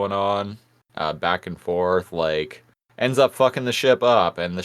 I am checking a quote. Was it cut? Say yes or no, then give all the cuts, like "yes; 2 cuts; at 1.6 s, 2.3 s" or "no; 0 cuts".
no; 0 cuts